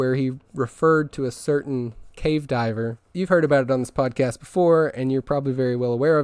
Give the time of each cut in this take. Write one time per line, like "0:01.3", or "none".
0:02.0
0:03.0